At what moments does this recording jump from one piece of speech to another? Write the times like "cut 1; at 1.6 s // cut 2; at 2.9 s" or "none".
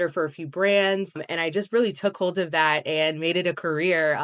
cut 1; at 1.3 s